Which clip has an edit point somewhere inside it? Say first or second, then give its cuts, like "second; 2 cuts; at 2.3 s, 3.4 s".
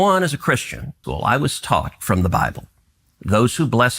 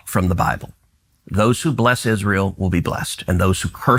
first; 1 cut; at 1.0 s